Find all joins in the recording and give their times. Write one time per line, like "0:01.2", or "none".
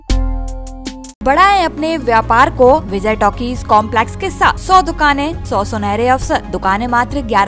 0:01.2
0:02.9
0:04.6
0:05.4
0:06.5